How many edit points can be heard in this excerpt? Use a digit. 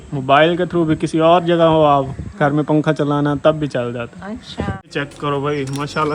1